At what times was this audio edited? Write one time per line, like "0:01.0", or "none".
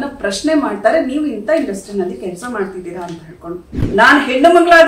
0:03.7

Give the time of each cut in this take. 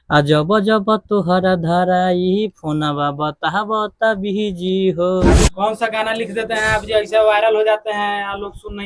0:05.4

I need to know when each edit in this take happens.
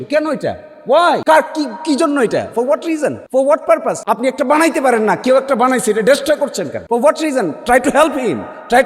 0:01.2
0:03.2
0:04.0
0:06.8

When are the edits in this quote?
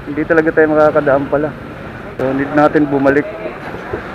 0:02.1

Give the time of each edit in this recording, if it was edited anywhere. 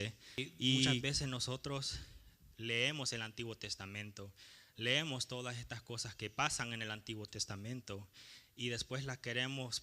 0:01.0

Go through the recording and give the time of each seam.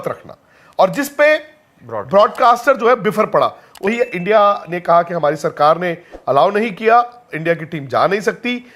0:03.8

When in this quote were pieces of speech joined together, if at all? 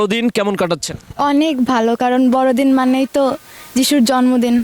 none

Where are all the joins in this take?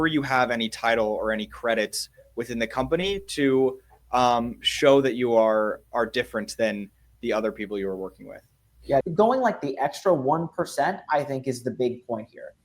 0:09.1

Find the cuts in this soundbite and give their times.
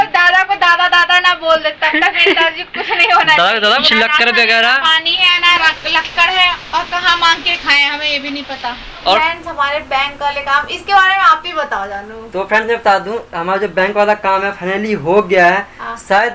0:03.8
0:09.2

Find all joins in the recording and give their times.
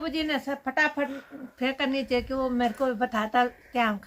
none

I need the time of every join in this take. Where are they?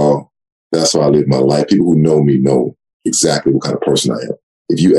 none

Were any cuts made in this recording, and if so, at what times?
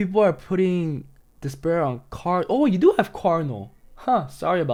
none

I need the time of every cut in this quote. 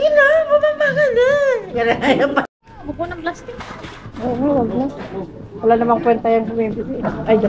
0:02.5

